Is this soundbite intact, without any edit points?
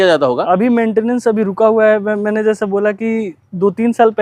yes; 0 cuts

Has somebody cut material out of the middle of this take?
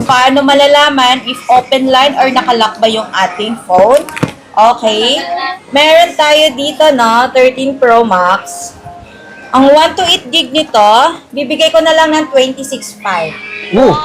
yes; 1 cut; at 5.5 s

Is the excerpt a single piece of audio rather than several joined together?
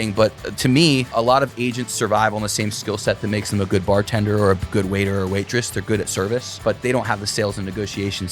no; 2 cuts; at 1.1 s, 6.5 s

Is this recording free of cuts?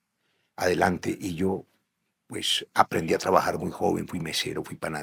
yes; 0 cuts

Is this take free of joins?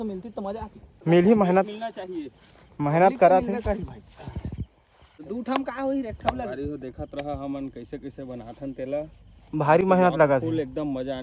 no; 2 cuts; at 0.9 s, 5.1 s

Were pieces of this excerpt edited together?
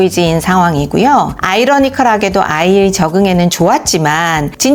no; 0 cuts

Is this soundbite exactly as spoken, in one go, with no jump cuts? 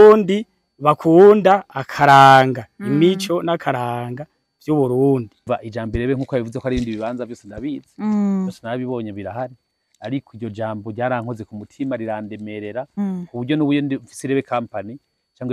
no; 1 cut; at 5.5 s

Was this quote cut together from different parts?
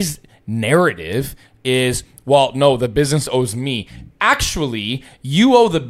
no; 0 cuts

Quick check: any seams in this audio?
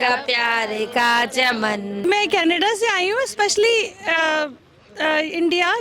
yes; 1 cut; at 2.0 s

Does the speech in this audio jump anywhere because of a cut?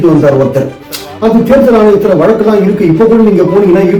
no; 0 cuts

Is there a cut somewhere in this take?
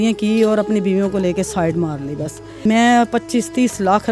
yes; 1 cut; at 2.6 s

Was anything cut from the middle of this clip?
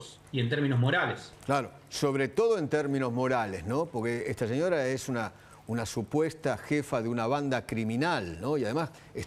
yes; 1 cut; at 1.3 s

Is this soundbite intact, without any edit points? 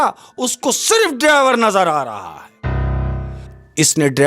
no; 1 cut; at 3.3 s

